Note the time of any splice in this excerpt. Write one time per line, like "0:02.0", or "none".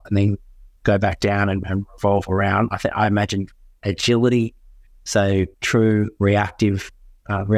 none